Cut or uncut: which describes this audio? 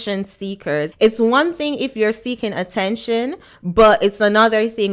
cut